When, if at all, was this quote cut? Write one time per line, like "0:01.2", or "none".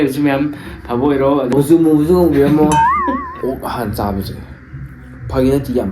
0:01.5
0:03.3